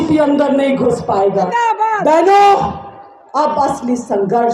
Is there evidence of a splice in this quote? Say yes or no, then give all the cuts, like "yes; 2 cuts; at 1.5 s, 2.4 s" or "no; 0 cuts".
yes; 1 cut; at 1.5 s